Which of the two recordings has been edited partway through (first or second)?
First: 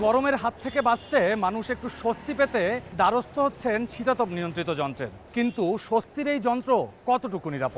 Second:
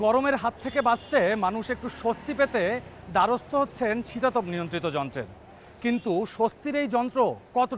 first